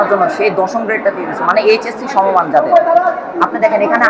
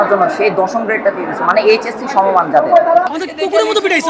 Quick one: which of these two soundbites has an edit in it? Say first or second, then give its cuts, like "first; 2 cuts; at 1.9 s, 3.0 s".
second; 1 cut; at 3.1 s